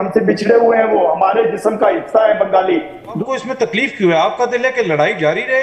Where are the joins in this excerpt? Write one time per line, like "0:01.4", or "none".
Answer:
0:03.2